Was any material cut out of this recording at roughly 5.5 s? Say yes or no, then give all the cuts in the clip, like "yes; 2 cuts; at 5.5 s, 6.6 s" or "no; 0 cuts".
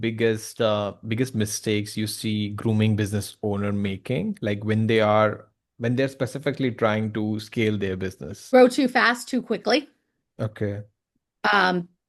no; 1 cut; at 8.3 s